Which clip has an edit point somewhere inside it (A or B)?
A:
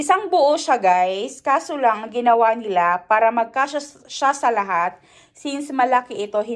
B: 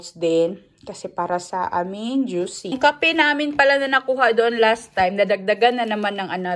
B